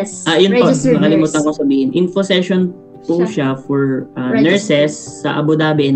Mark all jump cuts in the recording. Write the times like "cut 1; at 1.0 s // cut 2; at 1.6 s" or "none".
none